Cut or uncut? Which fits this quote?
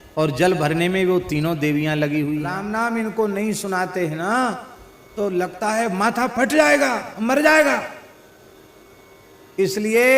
cut